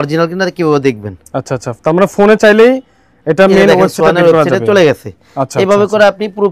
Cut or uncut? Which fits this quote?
uncut